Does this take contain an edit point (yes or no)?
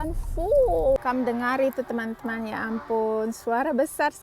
yes